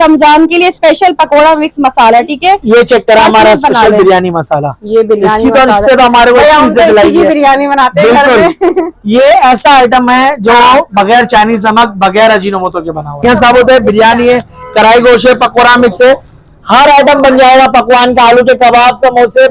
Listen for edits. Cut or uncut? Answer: cut